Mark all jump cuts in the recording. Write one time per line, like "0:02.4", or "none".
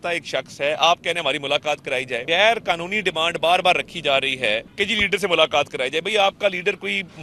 0:02.2
0:04.7